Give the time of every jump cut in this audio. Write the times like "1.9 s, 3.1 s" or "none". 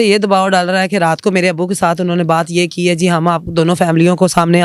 none